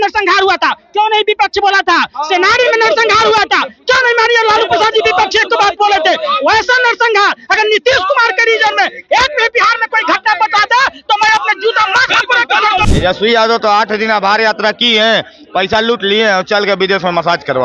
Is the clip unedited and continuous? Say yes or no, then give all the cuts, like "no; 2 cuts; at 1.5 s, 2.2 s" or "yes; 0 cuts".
no; 1 cut; at 12.8 s